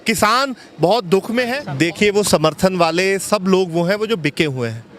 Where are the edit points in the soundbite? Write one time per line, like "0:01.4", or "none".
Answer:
0:01.6